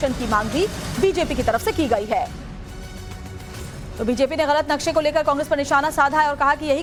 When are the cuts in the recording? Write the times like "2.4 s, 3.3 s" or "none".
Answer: none